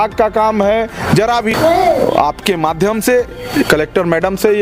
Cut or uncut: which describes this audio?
cut